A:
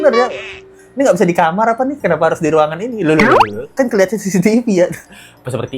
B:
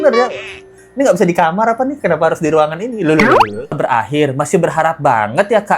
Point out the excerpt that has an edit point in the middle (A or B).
B